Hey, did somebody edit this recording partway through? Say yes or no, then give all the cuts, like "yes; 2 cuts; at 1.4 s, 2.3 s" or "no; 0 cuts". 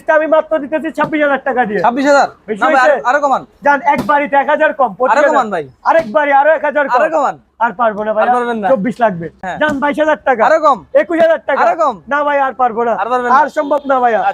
yes; 1 cut; at 9.4 s